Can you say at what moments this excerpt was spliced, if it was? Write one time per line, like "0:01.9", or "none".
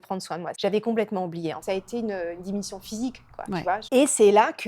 0:01.6
0:03.8